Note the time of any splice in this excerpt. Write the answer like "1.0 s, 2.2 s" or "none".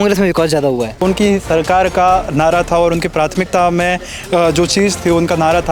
1.0 s